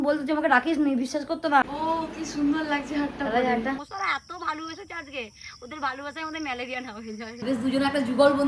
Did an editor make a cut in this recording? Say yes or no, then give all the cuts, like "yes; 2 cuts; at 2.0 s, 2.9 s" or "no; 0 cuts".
yes; 3 cuts; at 1.6 s, 3.9 s, 7.4 s